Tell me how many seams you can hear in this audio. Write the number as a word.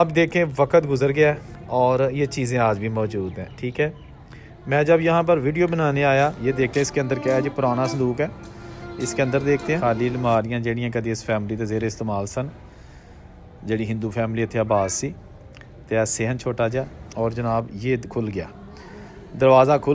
three